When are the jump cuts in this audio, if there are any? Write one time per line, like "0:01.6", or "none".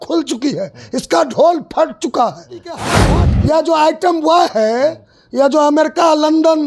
0:03.0